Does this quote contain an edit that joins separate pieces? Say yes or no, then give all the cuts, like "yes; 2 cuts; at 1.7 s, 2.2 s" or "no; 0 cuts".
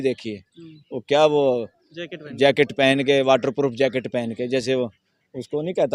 no; 0 cuts